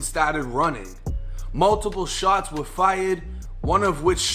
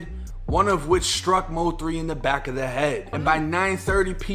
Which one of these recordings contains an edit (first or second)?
second